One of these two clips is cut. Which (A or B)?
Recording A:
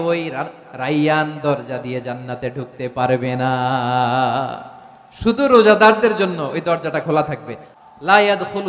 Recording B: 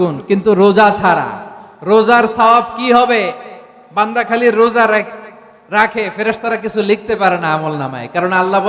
A